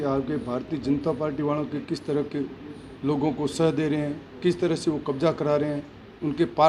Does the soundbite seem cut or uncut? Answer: uncut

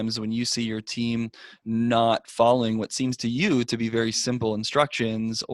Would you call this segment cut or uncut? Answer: uncut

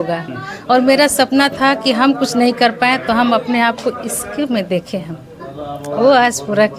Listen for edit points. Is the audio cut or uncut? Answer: uncut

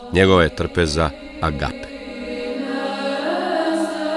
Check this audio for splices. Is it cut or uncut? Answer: cut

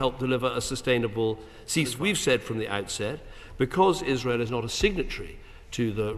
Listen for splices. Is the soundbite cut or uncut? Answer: cut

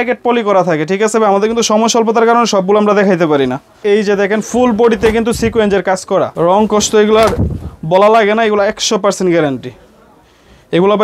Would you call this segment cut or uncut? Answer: cut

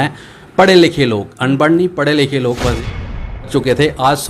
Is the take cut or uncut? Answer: cut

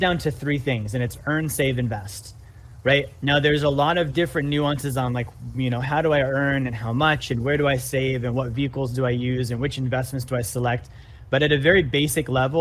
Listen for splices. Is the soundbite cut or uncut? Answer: uncut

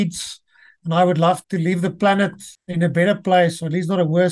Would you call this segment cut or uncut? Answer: cut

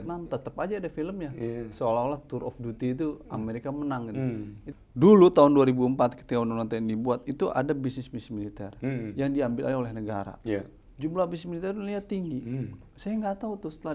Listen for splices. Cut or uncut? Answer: cut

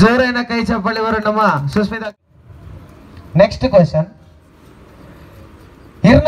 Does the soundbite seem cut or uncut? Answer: cut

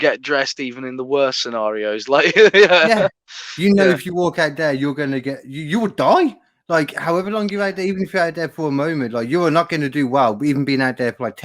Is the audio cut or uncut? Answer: uncut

